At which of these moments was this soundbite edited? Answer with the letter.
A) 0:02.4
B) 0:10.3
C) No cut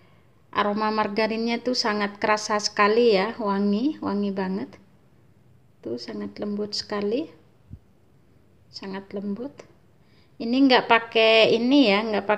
C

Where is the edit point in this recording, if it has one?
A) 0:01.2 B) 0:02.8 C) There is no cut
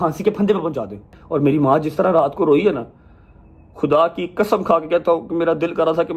A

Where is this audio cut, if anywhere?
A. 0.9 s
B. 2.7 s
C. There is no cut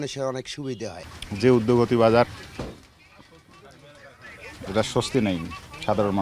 C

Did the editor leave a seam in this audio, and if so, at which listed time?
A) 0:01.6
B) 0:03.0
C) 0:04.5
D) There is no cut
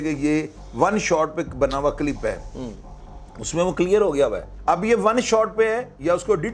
C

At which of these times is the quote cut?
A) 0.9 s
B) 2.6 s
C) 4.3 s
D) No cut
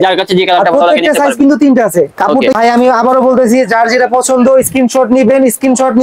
B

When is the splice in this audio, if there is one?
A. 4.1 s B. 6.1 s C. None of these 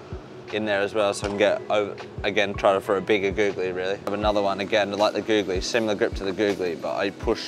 A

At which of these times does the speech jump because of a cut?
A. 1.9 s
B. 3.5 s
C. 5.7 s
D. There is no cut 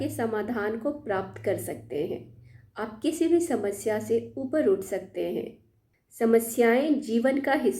C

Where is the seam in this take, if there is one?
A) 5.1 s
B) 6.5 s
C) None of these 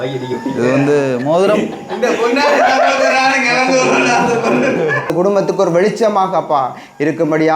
A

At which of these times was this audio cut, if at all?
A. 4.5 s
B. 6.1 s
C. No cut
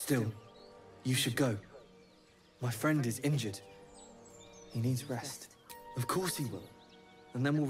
B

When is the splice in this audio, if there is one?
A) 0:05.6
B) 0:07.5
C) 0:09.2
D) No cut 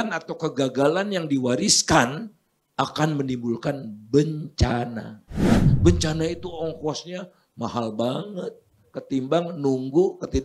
A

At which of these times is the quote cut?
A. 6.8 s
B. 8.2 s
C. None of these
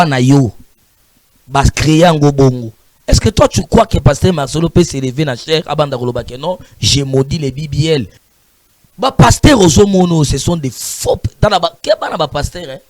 B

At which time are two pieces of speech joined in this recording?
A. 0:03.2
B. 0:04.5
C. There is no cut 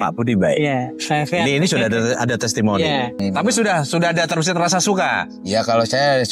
A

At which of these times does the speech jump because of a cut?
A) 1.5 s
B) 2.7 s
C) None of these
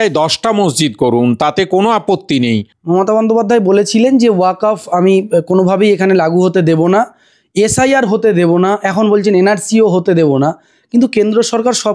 B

